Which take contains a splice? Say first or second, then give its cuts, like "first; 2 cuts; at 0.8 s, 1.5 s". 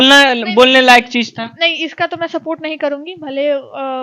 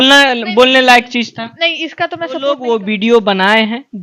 second; 1 cut; at 2.4 s